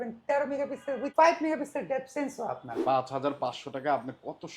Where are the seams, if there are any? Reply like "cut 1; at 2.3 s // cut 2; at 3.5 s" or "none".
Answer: cut 1; at 1.1 s // cut 2; at 2.7 s